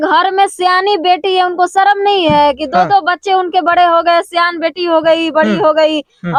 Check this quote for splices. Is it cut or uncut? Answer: uncut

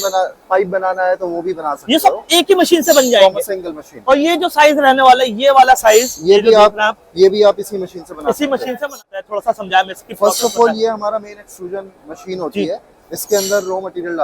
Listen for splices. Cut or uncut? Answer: cut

